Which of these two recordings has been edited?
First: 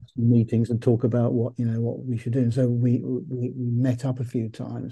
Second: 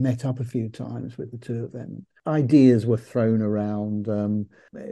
second; 1 cut; at 2.1 s

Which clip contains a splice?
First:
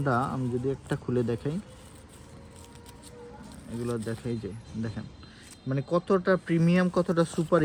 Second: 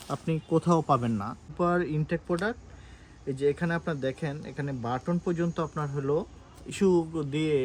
second; 2 cuts; at 1.5 s, 6.7 s

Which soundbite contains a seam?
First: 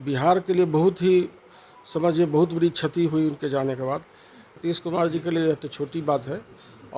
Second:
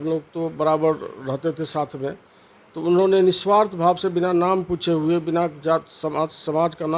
first; 1 cut; at 4.6 s

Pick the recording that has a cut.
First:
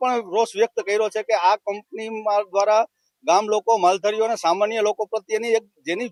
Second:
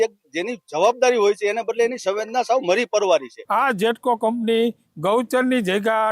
second; 1 cut; at 3.4 s

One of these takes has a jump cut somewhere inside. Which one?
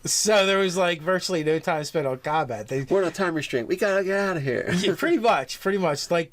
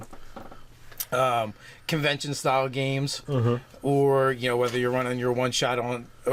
first; 1 cut; at 1.9 s

